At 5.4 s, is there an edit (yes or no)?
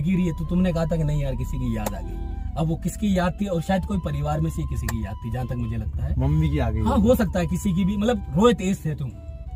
no